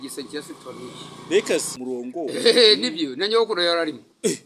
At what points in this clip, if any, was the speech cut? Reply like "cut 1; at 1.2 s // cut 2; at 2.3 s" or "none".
cut 1; at 1.7 s